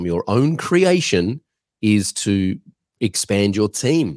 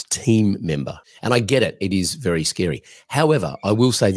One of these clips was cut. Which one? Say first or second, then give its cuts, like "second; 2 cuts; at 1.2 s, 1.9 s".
second; 1 cut; at 1.0 s